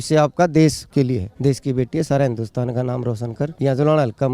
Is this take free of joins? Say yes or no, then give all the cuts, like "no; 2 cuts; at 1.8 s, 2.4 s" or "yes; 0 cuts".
no; 2 cuts; at 1.0 s, 3.5 s